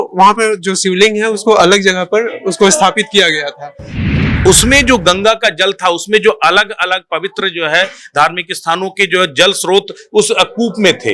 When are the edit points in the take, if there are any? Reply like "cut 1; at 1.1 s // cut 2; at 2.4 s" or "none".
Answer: cut 1; at 4.0 s